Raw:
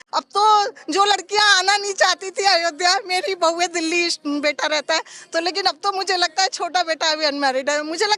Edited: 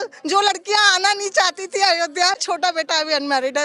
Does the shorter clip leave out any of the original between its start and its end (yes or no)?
yes